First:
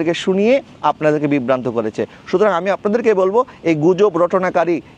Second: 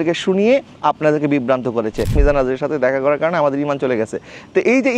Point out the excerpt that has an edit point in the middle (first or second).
second